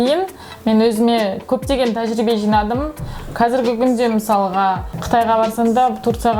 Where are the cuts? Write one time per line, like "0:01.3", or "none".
0:04.9